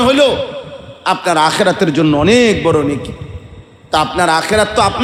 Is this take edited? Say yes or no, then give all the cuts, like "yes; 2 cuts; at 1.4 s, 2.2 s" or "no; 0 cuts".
no; 0 cuts